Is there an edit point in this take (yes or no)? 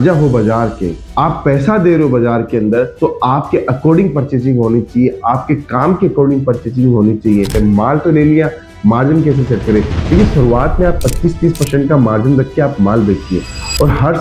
yes